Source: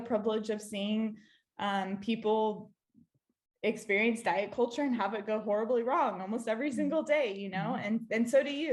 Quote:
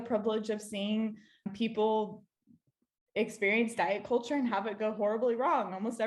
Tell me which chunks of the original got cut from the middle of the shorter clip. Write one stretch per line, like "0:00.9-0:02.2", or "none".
0:01.5-0:01.9